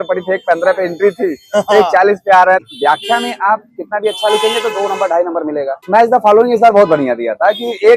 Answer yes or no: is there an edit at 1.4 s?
no